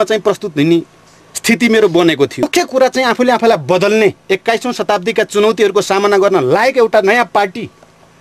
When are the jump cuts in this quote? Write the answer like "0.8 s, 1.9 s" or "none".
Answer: 2.4 s